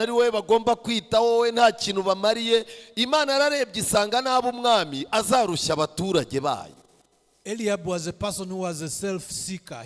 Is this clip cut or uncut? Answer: uncut